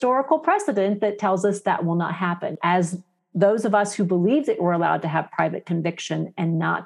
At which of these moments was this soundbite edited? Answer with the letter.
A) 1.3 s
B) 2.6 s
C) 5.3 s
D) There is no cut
B